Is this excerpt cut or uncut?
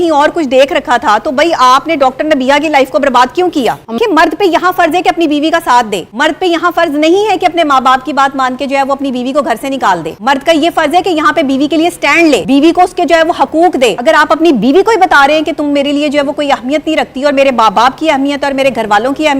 cut